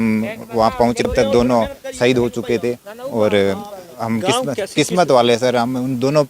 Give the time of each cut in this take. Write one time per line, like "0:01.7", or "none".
0:01.0